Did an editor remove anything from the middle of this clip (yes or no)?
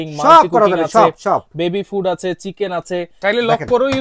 yes